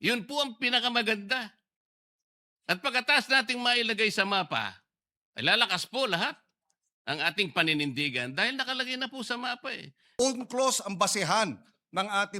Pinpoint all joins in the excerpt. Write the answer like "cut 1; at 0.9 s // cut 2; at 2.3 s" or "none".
cut 1; at 10.0 s

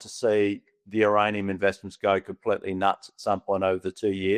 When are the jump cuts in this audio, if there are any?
none

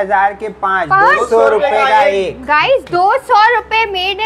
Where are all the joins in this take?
none

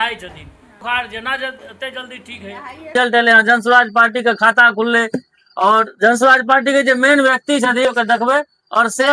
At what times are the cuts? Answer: cut 1; at 0.8 s // cut 2; at 2.9 s // cut 3; at 7.8 s

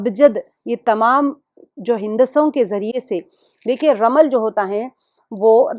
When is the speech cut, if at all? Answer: none

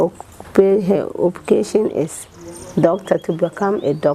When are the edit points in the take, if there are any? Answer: none

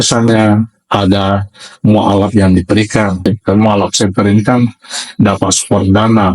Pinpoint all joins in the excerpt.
cut 1; at 3.2 s

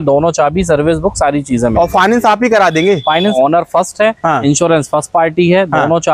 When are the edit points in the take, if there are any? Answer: cut 1; at 3.3 s

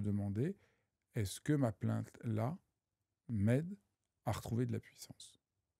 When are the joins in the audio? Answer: none

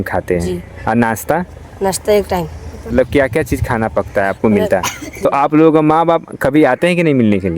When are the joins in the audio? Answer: cut 1; at 2.9 s // cut 2; at 5.3 s

